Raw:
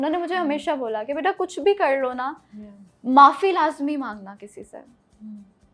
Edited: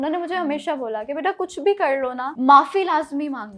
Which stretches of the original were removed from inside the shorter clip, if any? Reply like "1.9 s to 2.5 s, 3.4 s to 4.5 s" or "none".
2.3 s to 2.9 s